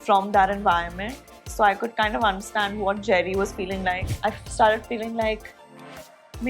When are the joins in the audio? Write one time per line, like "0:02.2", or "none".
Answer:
0:04.1